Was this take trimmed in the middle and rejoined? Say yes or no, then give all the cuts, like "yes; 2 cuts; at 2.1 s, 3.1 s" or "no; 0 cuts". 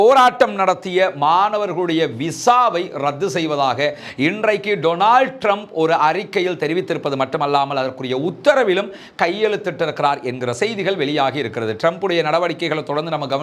no; 0 cuts